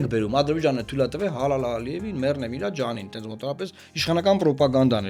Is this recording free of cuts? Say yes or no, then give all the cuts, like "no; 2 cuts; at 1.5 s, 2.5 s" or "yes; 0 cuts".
yes; 0 cuts